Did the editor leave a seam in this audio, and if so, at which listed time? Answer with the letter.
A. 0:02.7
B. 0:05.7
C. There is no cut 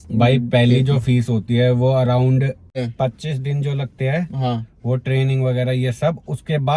A